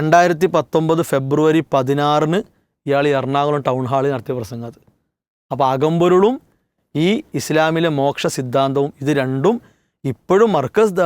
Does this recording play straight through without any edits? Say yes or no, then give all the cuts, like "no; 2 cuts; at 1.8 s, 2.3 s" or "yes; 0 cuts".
yes; 0 cuts